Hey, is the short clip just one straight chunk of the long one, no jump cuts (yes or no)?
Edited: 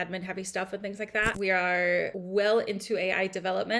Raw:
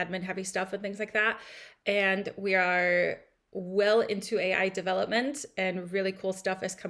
no